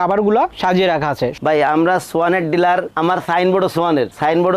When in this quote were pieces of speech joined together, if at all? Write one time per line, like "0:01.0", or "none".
0:01.4